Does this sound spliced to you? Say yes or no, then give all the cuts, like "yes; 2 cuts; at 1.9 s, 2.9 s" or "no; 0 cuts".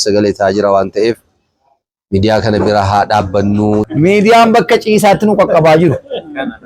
yes; 1 cut; at 3.9 s